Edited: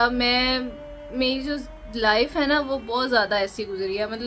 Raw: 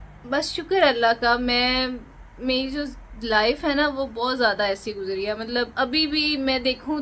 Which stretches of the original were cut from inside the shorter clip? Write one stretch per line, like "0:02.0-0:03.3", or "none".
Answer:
none